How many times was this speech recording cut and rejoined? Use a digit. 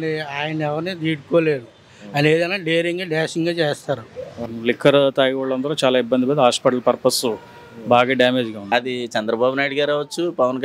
2